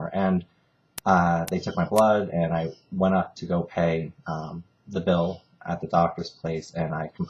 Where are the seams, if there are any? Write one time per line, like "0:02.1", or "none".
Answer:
none